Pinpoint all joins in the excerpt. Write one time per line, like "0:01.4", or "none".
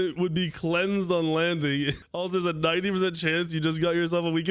0:02.0